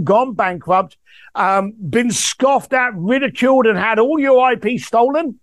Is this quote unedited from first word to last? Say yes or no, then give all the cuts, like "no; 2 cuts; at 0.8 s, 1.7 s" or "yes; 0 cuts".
yes; 0 cuts